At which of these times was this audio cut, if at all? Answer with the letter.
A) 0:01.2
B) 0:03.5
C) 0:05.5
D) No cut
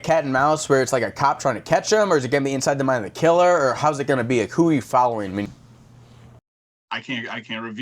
C